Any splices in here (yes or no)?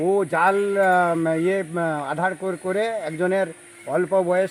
no